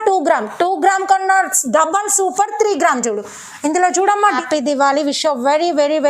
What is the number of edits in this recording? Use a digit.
1